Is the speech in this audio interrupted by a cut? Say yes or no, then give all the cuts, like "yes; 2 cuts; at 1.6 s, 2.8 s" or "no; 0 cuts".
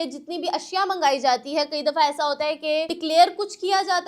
yes; 1 cut; at 3.0 s